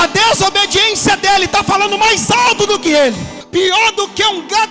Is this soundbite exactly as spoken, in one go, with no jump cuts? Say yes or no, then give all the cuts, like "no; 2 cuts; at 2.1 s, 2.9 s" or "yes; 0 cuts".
no; 1 cut; at 3.3 s